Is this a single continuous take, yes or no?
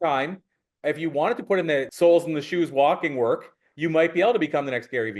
no